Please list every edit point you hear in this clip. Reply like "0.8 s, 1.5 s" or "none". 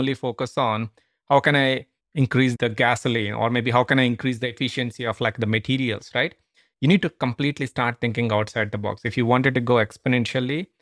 2.5 s

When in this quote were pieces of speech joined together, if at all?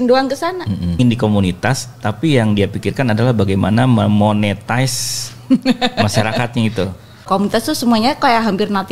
1.0 s, 7.3 s

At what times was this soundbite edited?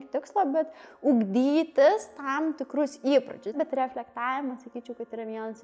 3.6 s

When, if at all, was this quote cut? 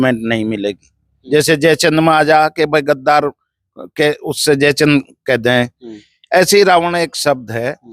1.1 s

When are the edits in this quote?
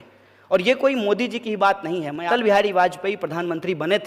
2.3 s

